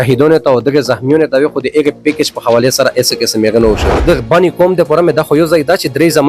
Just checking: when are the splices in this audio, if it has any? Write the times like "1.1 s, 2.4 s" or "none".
4.0 s